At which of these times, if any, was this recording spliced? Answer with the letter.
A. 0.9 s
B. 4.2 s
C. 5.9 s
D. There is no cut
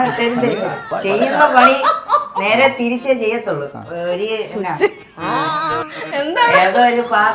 A